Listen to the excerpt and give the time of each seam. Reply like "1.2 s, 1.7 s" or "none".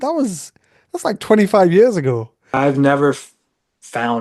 2.5 s

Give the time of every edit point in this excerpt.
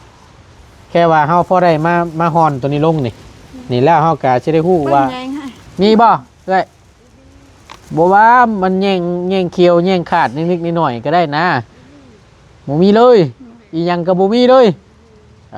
none

